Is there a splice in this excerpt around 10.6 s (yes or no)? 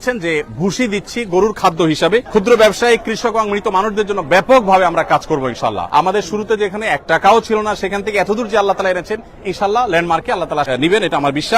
yes